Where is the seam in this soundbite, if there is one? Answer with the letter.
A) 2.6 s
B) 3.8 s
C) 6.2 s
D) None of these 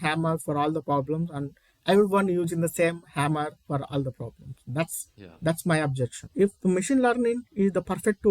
C